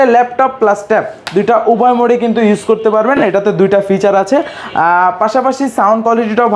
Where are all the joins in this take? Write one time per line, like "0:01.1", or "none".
none